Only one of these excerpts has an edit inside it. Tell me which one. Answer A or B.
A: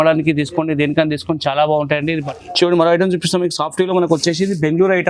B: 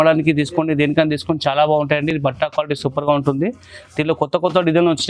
A